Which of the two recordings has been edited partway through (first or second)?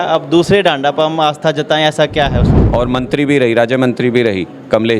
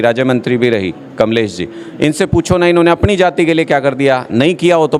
first